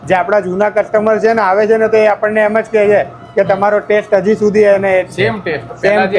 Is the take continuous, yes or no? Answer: yes